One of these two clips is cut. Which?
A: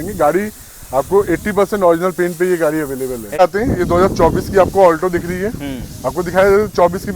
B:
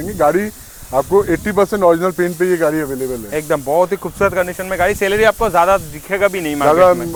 A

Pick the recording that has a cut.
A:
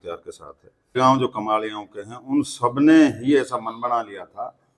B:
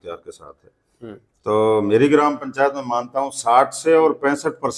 A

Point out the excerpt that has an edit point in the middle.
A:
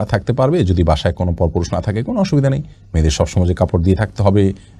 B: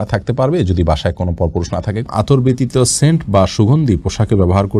B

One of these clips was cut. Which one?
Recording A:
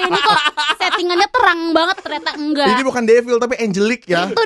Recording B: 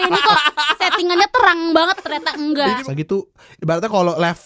B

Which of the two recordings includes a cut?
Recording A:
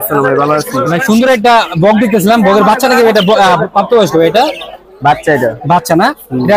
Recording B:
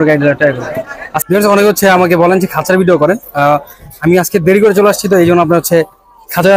B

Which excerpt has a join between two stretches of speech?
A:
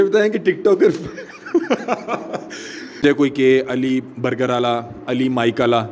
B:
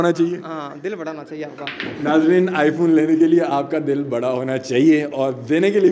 A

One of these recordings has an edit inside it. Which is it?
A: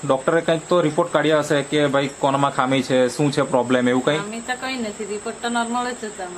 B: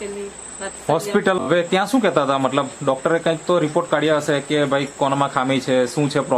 B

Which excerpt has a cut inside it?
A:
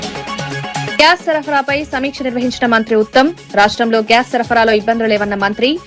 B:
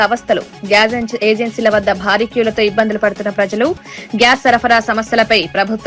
A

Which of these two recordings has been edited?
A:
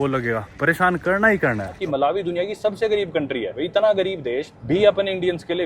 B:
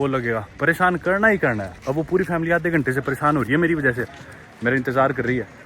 A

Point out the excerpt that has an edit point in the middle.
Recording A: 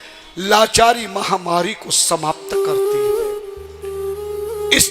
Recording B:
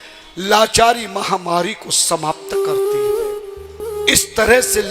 B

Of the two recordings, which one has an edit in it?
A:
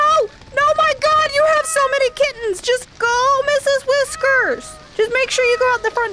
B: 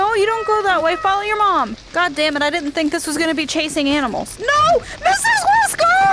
B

